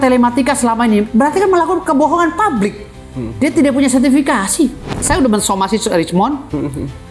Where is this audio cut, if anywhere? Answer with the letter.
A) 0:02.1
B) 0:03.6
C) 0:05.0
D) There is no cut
C